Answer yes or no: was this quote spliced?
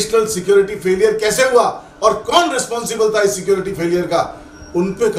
no